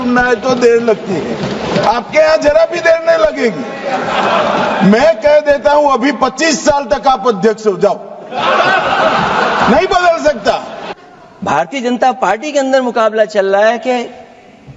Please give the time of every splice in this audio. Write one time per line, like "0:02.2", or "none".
0:10.8